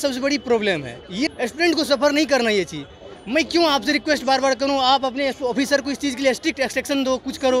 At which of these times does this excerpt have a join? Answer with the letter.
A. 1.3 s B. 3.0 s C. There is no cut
A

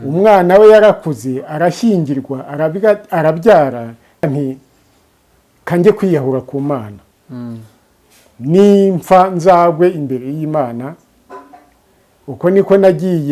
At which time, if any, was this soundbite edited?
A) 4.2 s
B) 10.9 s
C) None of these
A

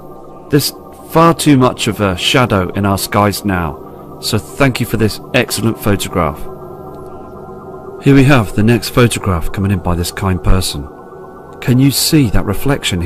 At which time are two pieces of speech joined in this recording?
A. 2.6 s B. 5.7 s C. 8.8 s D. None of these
B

